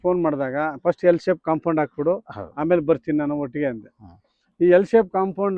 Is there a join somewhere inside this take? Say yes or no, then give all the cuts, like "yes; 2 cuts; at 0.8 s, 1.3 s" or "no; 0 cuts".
no; 0 cuts